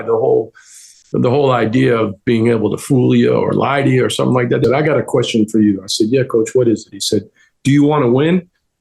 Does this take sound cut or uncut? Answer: cut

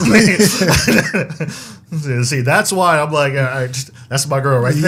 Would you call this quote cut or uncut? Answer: uncut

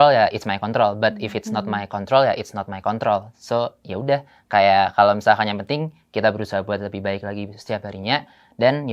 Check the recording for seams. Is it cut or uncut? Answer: uncut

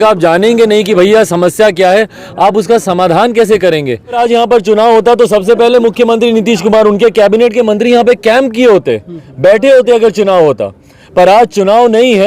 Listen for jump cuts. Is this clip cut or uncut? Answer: cut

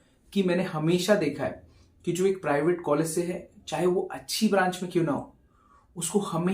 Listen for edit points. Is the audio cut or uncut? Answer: uncut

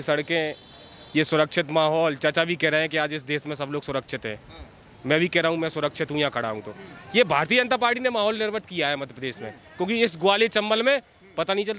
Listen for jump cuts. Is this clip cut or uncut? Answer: uncut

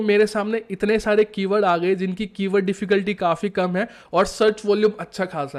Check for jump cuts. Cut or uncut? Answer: uncut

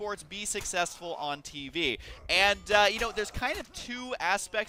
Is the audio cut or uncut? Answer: uncut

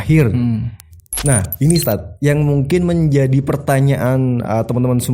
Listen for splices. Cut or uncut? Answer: uncut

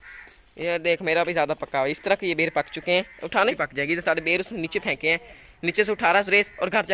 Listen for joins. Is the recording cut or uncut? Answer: cut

